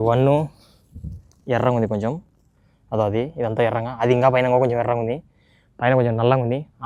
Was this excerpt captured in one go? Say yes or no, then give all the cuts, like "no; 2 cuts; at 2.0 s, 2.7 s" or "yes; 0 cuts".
yes; 0 cuts